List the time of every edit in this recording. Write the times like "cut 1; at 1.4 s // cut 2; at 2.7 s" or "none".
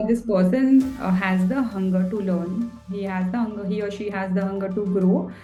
none